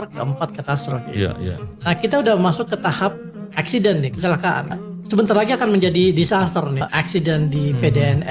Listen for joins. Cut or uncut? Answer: cut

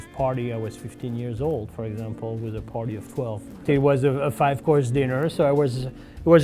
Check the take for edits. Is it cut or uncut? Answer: cut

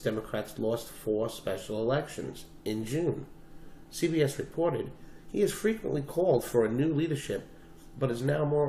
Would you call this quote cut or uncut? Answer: cut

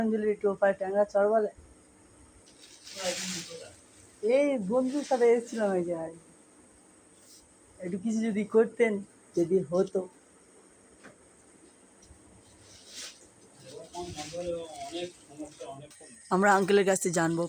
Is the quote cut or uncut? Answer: cut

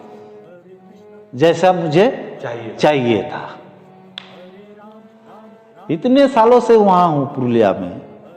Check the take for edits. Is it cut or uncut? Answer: uncut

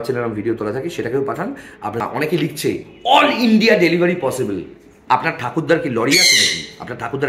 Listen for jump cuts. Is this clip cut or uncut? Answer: cut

